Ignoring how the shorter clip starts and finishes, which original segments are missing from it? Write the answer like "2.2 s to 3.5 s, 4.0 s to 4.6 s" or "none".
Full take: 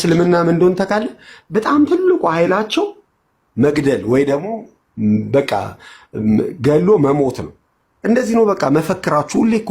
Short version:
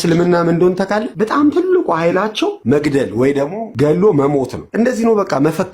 1.1 s to 1.4 s, 2.9 s to 3.5 s, 4.6 s to 6.5 s, 7.4 s to 7.9 s